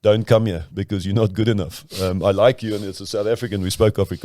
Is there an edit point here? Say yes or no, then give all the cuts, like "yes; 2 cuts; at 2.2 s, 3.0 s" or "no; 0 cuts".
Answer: no; 0 cuts